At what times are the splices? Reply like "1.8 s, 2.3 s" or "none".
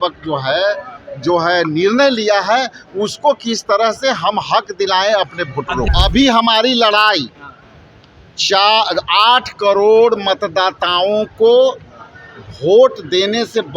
5.9 s